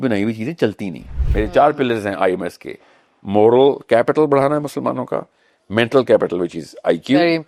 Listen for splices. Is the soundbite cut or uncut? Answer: cut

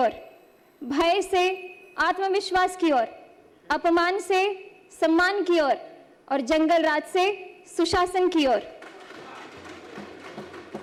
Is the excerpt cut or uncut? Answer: uncut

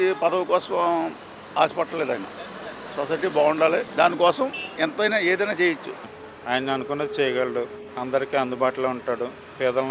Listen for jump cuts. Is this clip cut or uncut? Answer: cut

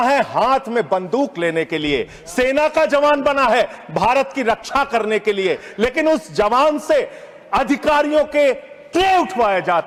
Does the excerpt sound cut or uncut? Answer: uncut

